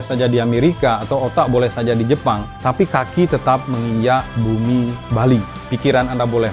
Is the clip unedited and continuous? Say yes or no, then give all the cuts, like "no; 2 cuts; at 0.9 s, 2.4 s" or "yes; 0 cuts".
no; 3 cuts; at 2.5 s, 4.3 s, 5.6 s